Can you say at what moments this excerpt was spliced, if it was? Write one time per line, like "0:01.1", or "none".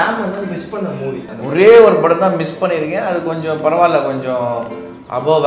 0:01.3